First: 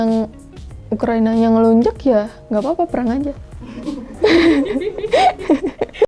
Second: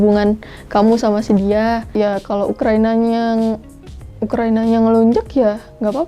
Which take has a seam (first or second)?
second